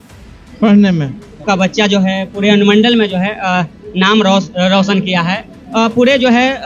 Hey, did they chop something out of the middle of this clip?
yes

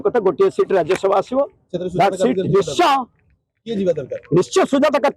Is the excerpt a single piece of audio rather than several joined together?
yes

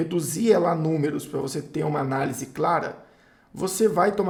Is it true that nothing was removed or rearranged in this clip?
yes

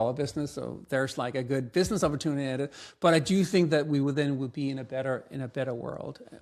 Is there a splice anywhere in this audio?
no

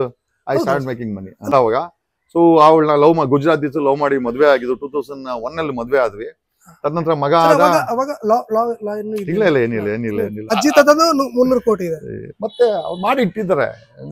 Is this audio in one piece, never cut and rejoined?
no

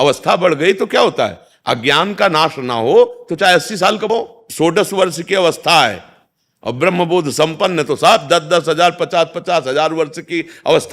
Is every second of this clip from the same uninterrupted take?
no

